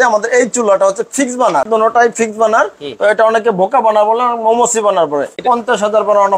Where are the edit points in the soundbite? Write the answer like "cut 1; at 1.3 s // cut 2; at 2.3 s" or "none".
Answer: cut 1; at 1.6 s // cut 2; at 5.4 s